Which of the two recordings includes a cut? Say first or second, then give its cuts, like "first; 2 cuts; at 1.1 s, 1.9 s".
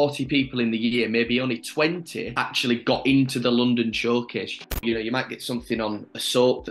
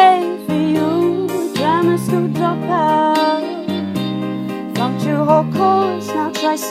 first; 1 cut; at 4.8 s